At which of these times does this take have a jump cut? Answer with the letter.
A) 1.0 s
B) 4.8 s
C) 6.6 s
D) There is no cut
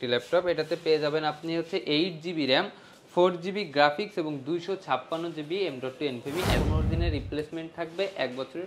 C